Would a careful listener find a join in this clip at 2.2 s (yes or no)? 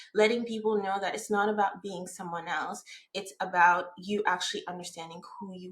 no